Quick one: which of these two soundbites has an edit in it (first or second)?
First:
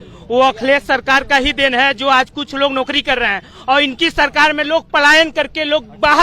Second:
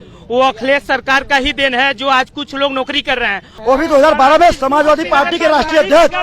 second